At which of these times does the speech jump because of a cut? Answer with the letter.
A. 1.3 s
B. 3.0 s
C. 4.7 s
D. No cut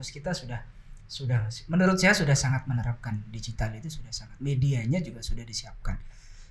D